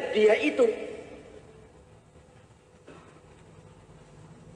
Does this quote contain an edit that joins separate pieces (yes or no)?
no